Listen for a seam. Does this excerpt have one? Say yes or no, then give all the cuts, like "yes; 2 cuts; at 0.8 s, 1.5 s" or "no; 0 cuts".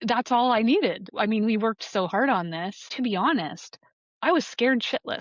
yes; 2 cuts; at 1.1 s, 2.9 s